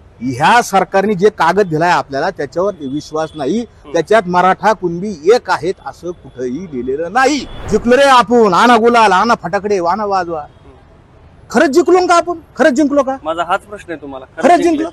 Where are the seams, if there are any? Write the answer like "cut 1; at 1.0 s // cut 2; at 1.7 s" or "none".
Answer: cut 1; at 7.5 s